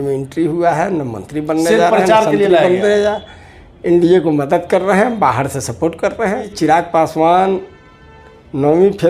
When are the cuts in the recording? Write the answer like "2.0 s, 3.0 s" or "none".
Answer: 6.5 s